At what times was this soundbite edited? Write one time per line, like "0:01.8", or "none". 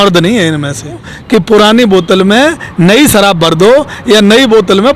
0:01.1